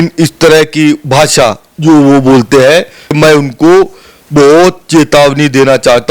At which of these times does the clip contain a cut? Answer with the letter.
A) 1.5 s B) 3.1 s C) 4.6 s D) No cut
B